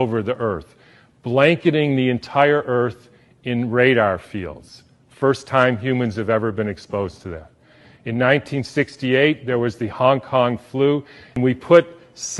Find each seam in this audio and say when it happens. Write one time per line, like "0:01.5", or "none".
0:11.4